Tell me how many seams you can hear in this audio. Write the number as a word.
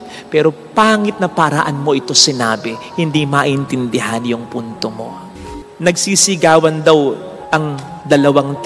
one